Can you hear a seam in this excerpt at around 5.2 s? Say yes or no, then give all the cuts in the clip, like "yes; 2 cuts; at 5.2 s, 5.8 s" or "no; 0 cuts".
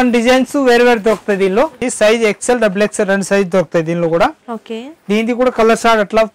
no; 1 cut; at 1.9 s